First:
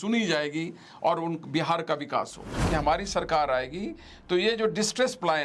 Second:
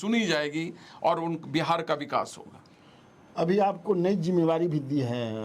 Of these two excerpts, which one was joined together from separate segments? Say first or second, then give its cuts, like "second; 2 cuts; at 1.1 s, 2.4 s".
first; 1 cut; at 2.6 s